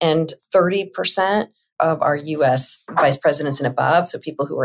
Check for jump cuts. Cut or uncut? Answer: uncut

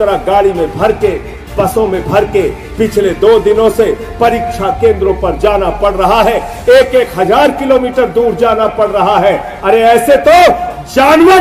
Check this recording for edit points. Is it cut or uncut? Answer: uncut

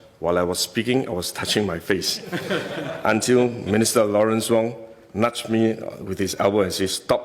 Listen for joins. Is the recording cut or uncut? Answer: uncut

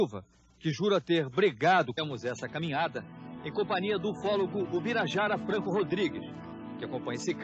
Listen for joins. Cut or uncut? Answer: uncut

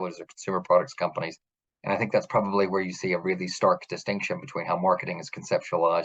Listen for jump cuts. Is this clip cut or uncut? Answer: uncut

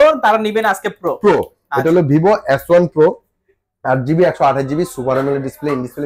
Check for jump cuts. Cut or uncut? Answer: uncut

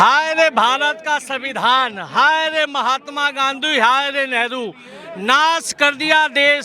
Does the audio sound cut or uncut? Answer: uncut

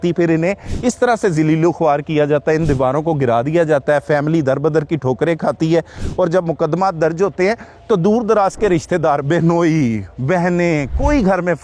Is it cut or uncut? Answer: uncut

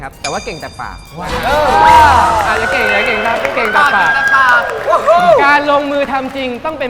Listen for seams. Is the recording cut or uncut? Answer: uncut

